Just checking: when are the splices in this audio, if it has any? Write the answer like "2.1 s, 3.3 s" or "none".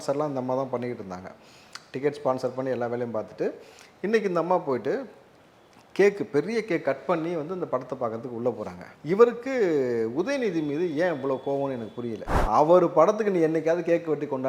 12.3 s